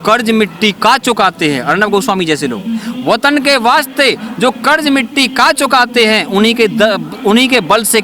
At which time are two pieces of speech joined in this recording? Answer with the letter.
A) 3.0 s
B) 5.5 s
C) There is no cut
C